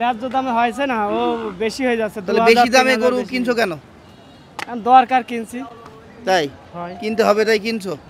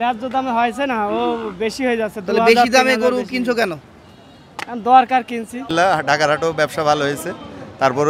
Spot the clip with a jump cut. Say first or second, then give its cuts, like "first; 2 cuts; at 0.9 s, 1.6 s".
second; 1 cut; at 5.7 s